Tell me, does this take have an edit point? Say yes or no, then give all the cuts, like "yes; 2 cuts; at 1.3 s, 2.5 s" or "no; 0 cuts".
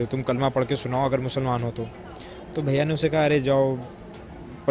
no; 0 cuts